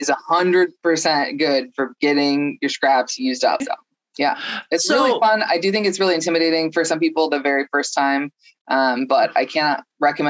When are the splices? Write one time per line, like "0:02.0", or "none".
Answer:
0:03.6

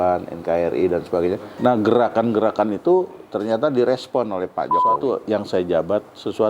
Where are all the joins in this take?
0:01.5
0:05.0

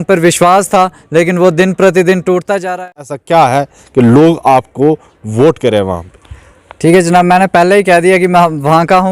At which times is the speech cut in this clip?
0:02.8

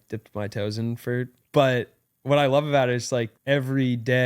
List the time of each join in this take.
0:01.4
0:03.3

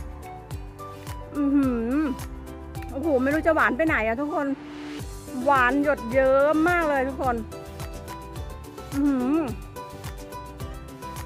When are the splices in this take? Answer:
0:00.9
0:07.5
0:08.9

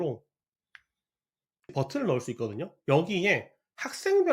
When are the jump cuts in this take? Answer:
0:01.7

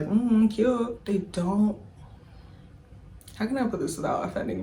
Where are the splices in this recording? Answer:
0:01.0

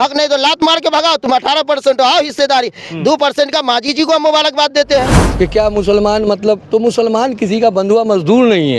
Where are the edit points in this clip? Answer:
0:05.2

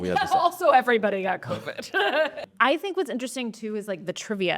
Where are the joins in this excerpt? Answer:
0:02.4

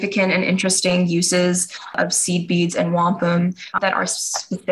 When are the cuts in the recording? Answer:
0:03.7

